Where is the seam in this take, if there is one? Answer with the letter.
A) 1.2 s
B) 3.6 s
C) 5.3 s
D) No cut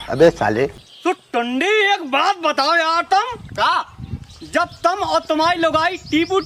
A